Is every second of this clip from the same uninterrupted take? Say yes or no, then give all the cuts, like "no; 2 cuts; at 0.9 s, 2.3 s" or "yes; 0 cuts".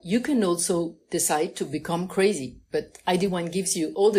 yes; 0 cuts